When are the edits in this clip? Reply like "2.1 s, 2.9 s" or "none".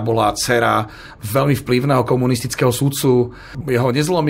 none